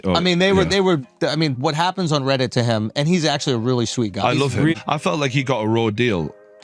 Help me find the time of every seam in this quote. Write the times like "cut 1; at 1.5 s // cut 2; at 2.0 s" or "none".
cut 1; at 4.7 s